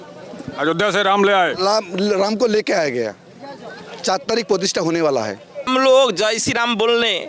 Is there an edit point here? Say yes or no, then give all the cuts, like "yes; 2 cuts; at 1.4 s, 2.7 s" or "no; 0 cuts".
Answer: yes; 1 cut; at 5.7 s